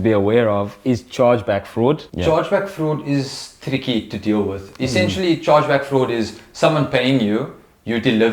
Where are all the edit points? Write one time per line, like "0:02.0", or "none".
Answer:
0:02.1